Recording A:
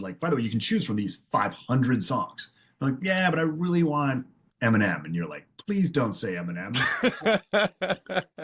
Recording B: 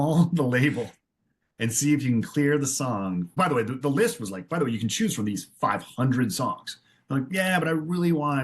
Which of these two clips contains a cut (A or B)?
B